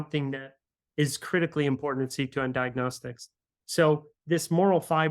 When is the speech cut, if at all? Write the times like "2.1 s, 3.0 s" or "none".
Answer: 4.1 s